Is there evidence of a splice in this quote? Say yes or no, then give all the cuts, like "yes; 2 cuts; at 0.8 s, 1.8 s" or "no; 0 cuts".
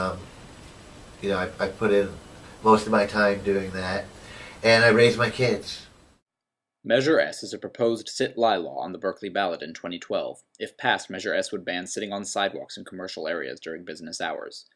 no; 0 cuts